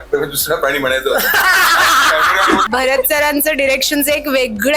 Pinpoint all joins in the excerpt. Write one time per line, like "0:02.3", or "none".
0:02.7